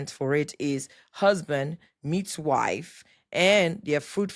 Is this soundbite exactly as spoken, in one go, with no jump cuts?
yes; 0 cuts

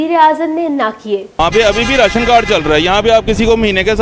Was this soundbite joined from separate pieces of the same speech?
yes; 1 cut; at 1.4 s

